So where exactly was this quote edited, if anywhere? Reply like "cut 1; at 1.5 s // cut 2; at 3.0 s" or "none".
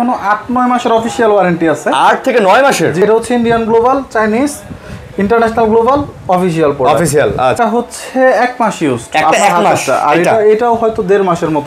cut 1; at 3.0 s // cut 2; at 7.6 s